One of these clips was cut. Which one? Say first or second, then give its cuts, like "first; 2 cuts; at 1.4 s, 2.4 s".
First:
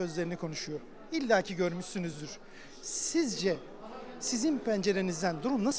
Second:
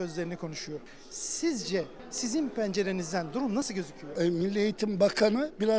second; 3 cuts; at 0.9 s, 2.0 s, 4.0 s